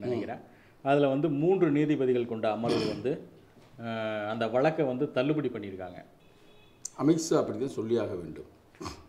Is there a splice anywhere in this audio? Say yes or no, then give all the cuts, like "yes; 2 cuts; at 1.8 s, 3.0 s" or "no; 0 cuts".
yes; 1 cut; at 6.1 s